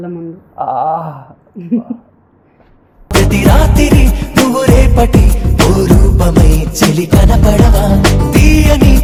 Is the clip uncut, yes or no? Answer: yes